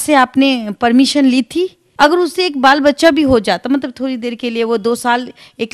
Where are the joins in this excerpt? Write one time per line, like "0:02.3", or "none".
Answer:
0:01.8